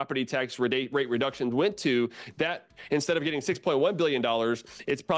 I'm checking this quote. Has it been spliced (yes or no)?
no